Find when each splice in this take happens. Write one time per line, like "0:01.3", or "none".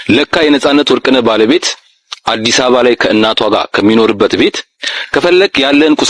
none